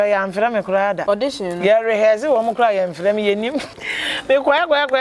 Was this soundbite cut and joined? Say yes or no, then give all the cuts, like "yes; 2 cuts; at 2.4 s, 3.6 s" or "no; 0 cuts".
yes; 2 cuts; at 1.0 s, 3.8 s